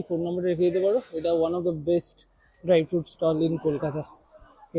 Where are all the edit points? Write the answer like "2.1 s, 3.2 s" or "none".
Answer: none